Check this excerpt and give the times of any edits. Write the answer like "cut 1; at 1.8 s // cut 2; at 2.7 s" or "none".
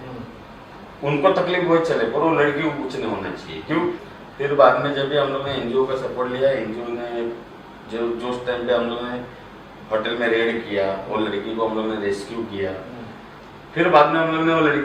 cut 1; at 4.0 s